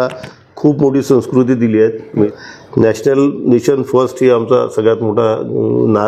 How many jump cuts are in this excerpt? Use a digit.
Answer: 1